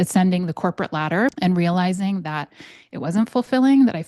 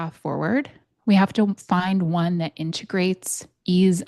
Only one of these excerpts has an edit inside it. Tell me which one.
first; 1 cut; at 1.4 s

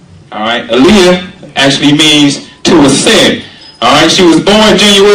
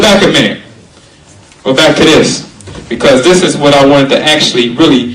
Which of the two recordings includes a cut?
first; 1 cut; at 1.7 s

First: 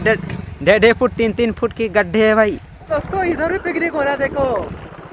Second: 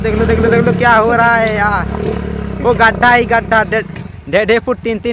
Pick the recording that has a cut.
first; 1 cut; at 2.9 s

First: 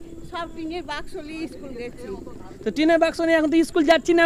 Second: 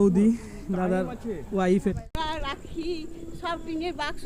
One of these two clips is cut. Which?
second; 1 cut; at 1.9 s

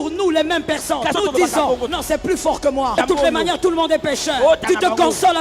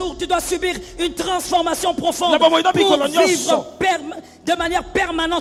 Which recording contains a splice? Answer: first; 4 cuts; at 1.1 s, 1.9 s, 3.0 s, 4.6 s

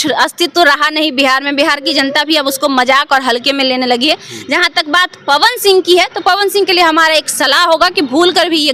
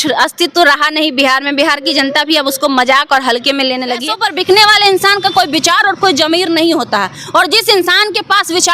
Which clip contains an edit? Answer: second; 1 cut; at 4.1 s

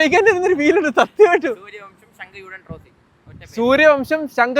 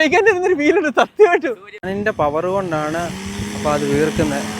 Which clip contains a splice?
second; 1 cut; at 1.8 s

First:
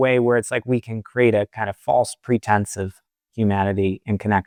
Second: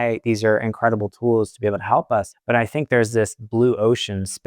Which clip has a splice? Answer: second; 1 cut; at 2.3 s

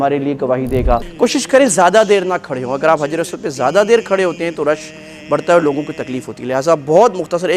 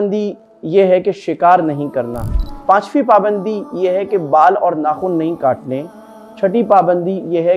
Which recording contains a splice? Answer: first; 1 cut; at 1.1 s

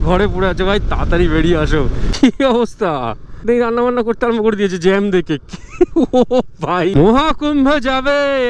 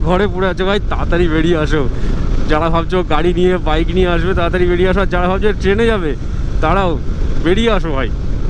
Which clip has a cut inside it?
first; 3 cuts; at 2.0 s, 3.5 s, 6.9 s

